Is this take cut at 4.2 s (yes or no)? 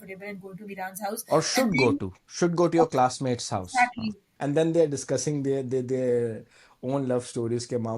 yes